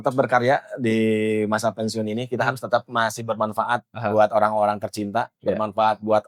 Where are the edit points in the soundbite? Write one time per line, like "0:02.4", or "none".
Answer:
none